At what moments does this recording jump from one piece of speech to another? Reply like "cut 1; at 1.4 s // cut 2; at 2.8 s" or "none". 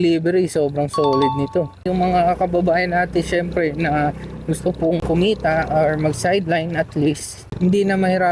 cut 1; at 1.8 s // cut 2; at 5.0 s